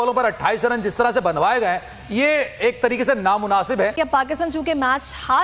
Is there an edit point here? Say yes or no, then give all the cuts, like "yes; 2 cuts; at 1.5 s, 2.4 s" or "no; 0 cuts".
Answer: yes; 1 cut; at 4.0 s